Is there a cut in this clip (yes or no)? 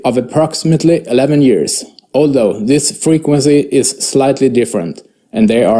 yes